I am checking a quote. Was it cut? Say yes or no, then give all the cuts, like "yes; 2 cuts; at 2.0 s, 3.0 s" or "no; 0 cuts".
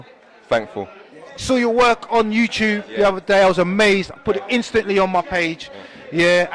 yes; 1 cut; at 2.3 s